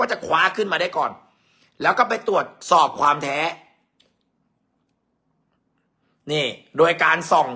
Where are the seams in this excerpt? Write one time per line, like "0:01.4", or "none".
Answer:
none